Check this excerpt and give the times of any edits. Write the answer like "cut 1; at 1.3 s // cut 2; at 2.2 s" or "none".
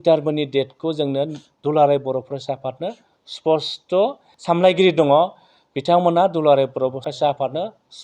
cut 1; at 4.3 s // cut 2; at 7.1 s